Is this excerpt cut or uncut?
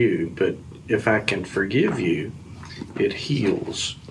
uncut